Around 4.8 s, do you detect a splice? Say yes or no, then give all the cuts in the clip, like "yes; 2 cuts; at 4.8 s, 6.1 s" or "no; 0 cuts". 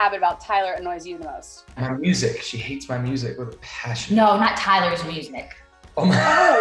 no; 1 cut; at 1.8 s